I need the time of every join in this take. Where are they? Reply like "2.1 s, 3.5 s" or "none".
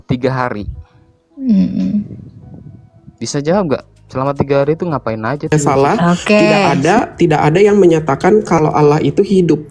6.7 s